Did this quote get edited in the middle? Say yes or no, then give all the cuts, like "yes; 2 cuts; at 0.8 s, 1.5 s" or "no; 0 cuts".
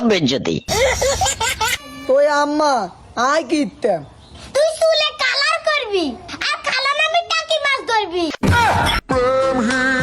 yes; 2 cuts; at 1.9 s, 8.3 s